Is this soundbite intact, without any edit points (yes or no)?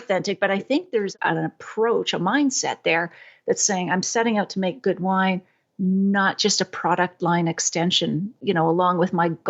no